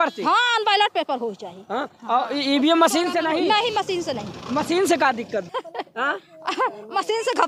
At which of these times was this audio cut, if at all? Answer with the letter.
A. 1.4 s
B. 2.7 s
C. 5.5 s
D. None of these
C